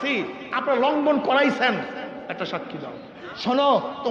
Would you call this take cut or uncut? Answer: cut